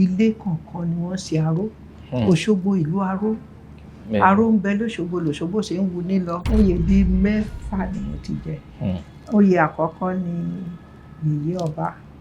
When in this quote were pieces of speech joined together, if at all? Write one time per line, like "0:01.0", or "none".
0:06.4